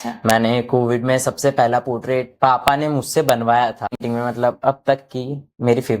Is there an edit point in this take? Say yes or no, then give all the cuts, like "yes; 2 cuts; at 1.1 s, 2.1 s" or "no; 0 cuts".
yes; 1 cut; at 4.0 s